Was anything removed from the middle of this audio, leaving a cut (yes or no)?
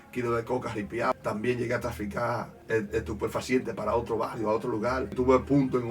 yes